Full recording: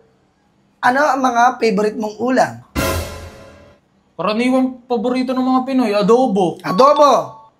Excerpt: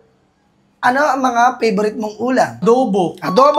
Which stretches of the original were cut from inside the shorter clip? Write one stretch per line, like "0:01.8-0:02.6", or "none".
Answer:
0:02.6-0:06.0